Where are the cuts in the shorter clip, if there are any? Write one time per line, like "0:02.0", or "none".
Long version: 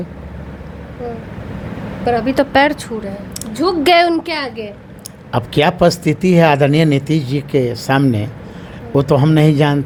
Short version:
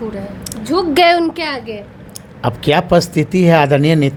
none